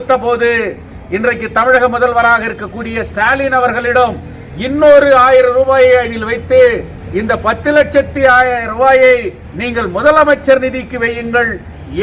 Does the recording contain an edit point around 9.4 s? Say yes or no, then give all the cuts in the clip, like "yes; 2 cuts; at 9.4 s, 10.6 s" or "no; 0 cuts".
no; 0 cuts